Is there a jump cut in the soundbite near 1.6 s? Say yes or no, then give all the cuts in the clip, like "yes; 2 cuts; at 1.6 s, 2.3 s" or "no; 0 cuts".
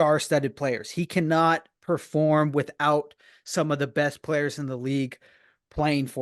no; 0 cuts